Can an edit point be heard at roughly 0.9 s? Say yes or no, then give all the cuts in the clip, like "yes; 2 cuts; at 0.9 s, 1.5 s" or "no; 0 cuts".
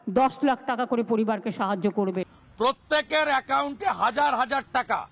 no; 1 cut; at 2.2 s